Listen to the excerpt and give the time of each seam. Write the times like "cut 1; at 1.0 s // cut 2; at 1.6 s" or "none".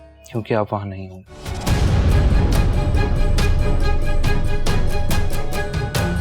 none